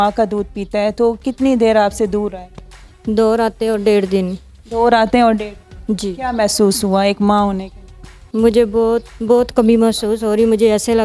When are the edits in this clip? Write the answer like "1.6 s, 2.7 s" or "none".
none